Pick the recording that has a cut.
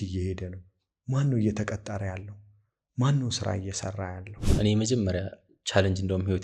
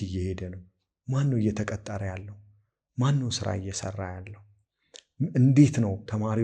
first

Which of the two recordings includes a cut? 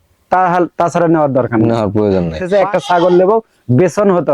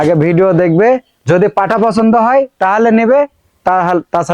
first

